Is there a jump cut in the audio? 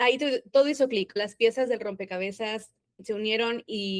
yes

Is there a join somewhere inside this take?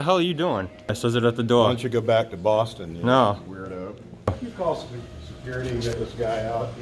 yes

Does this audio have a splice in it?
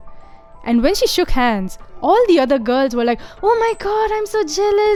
no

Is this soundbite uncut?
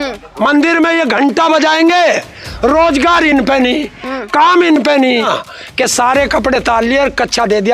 no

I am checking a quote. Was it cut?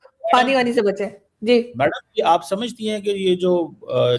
no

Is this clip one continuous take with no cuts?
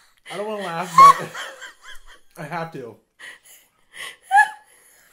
yes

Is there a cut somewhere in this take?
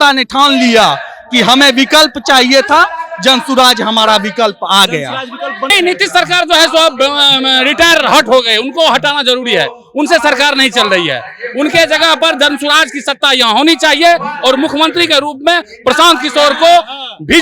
yes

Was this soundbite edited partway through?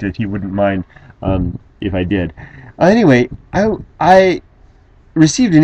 yes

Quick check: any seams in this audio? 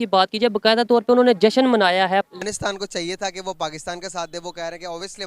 yes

